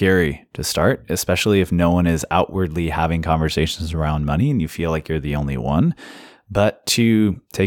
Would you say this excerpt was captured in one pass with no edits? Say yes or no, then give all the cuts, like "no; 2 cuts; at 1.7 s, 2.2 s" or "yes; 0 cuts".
yes; 0 cuts